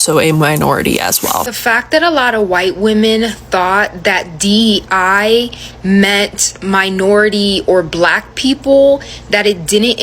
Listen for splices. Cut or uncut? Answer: cut